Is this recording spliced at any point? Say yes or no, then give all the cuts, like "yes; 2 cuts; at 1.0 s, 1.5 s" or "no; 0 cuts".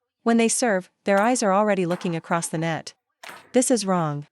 yes; 1 cut; at 3.2 s